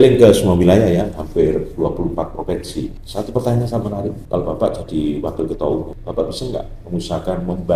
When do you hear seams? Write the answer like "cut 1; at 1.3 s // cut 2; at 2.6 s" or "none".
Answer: cut 1; at 3.0 s // cut 2; at 4.2 s // cut 3; at 6.0 s